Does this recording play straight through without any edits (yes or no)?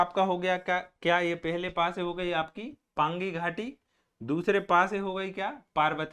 yes